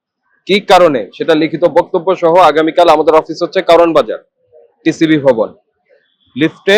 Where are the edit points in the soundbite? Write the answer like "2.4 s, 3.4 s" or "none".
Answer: none